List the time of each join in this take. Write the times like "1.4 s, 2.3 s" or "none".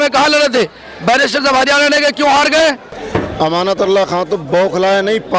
3.3 s

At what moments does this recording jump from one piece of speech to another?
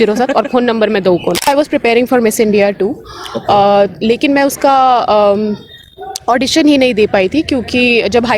1.5 s

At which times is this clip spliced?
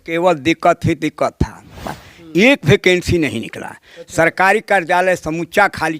1.7 s

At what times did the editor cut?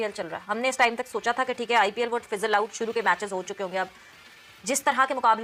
none

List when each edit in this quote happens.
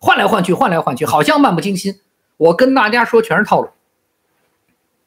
none

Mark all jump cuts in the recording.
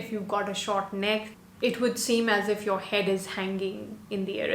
1.3 s

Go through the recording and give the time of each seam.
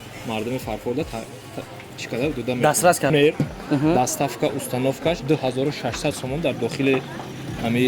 3.1 s

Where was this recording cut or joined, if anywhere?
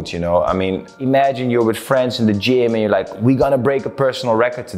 1.0 s

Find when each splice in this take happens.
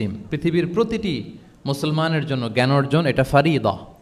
none

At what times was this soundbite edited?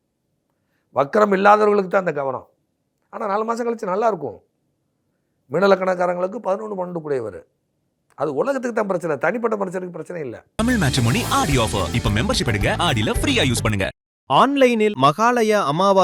10.4 s

